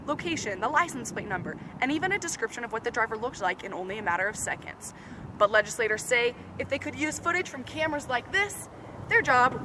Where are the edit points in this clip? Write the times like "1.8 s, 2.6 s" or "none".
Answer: none